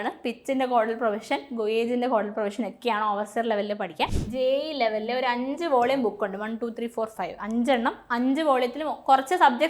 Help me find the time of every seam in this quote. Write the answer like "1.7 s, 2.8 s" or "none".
4.2 s